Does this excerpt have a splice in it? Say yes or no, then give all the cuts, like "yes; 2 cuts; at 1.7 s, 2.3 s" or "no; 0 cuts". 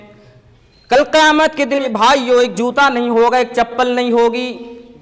yes; 1 cut; at 1.8 s